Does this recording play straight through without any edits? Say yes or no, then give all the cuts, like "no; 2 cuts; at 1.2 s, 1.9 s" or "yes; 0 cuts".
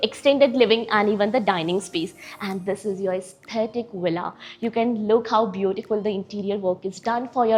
yes; 0 cuts